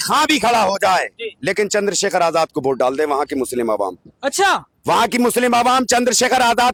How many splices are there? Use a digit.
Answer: 0